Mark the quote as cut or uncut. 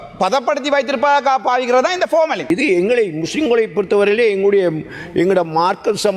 cut